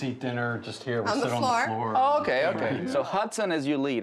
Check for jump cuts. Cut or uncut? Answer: cut